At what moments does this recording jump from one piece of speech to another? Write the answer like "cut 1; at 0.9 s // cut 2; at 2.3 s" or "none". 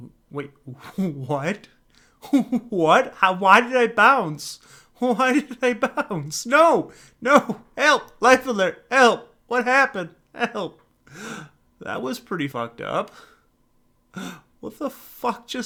none